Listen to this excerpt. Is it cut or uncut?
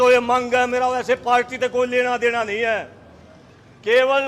uncut